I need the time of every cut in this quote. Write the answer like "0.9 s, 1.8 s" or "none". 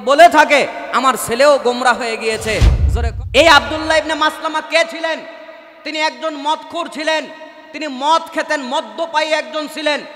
2.8 s